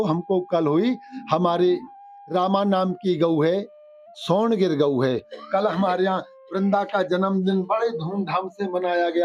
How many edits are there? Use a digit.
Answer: 1